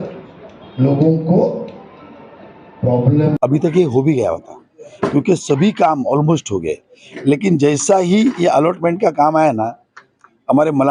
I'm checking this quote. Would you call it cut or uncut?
cut